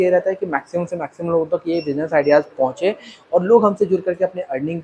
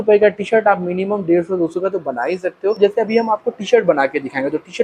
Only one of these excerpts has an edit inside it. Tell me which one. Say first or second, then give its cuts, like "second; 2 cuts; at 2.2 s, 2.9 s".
second; 1 cut; at 2.8 s